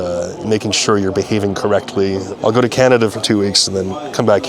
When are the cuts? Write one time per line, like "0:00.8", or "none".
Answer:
0:02.3